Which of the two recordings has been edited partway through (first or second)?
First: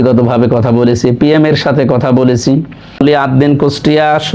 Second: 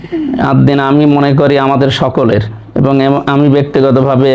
first